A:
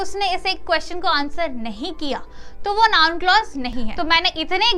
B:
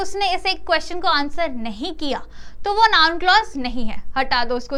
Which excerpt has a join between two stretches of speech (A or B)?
A